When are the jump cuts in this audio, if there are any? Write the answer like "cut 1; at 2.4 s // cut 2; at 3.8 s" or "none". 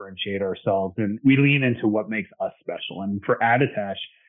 cut 1; at 1.2 s